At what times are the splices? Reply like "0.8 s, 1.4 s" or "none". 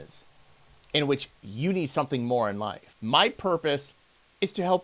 2.9 s